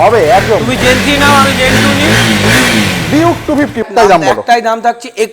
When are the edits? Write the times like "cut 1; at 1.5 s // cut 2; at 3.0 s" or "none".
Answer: cut 1; at 3.8 s